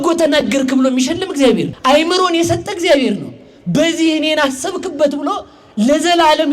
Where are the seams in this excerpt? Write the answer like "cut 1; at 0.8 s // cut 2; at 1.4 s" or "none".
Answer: cut 1; at 1.7 s